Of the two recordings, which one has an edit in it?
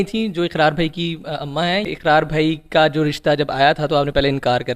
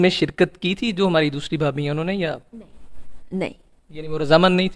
first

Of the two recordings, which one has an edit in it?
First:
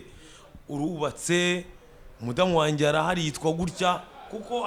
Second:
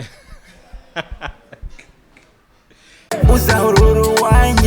second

